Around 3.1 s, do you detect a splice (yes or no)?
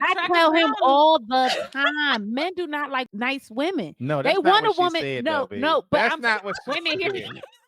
yes